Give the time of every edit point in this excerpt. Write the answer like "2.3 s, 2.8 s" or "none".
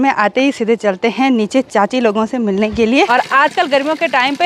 3.1 s